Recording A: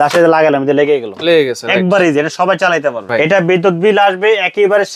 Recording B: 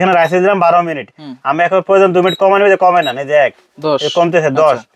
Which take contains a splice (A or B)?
A